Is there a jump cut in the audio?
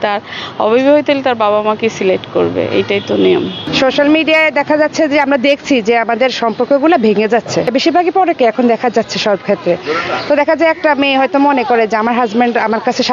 no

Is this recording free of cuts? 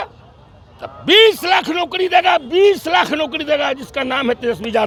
yes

